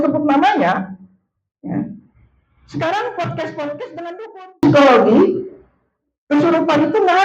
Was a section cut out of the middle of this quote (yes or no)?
yes